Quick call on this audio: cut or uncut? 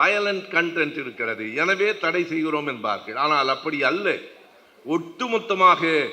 uncut